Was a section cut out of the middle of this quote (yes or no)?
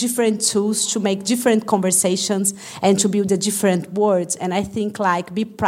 no